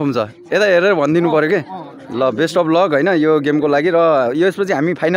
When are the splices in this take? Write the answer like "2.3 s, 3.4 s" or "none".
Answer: none